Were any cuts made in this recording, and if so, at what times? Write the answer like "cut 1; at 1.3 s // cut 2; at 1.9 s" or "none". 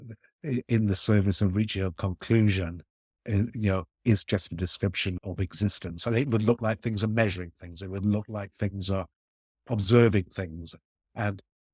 cut 1; at 5.2 s // cut 2; at 9.6 s